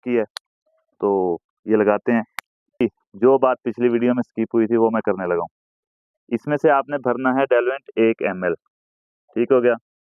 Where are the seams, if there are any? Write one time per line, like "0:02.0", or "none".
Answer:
0:02.8